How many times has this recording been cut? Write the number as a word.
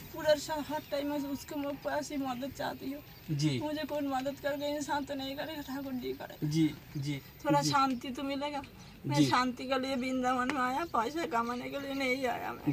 one